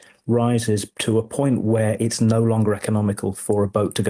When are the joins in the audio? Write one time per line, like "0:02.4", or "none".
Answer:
0:00.9